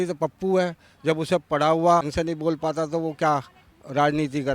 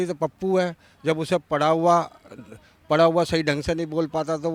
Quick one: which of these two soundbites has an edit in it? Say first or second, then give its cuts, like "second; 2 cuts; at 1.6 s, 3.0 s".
first; 1 cut; at 2.1 s